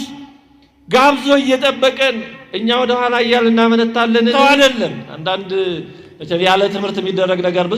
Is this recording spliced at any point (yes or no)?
yes